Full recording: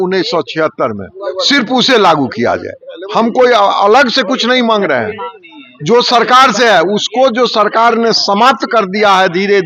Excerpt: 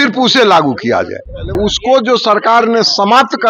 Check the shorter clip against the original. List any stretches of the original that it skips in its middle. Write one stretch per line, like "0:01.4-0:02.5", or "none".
0:03.1-0:06.9